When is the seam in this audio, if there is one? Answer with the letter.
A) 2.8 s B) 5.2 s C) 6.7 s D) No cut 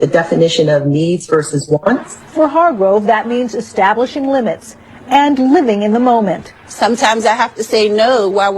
A